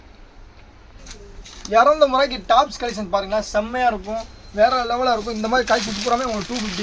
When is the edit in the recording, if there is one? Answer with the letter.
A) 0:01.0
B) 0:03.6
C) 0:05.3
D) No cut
A